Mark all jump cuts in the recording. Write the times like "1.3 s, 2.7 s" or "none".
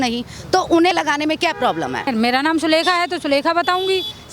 0.9 s, 2.1 s